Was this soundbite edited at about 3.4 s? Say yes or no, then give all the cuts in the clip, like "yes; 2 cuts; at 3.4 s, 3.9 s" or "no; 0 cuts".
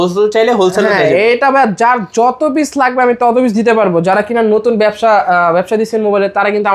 no; 0 cuts